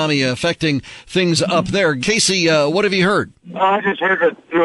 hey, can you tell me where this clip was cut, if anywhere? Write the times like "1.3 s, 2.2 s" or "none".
2.0 s, 3.4 s